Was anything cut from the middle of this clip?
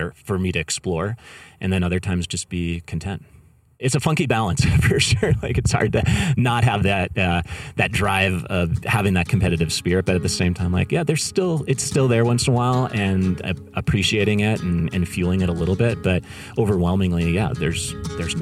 yes; 1 cut; at 3.8 s

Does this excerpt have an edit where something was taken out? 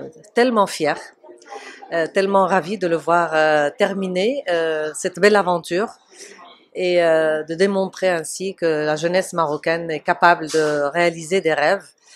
no; 0 cuts

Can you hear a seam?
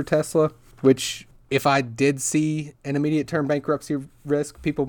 no; 0 cuts

